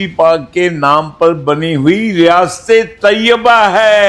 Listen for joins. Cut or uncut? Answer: uncut